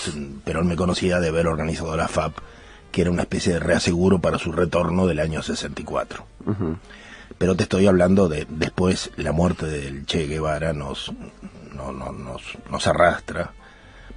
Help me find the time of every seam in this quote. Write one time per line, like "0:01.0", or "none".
0:01.4